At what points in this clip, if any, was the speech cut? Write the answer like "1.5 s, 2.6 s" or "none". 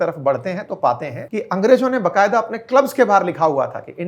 1.2 s

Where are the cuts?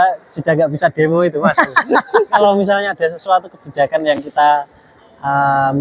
2.4 s

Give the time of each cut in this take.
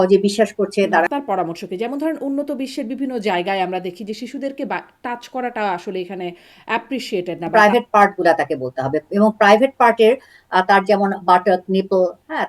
1.1 s, 7.5 s

